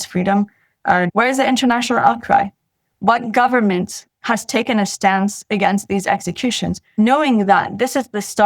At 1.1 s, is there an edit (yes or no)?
yes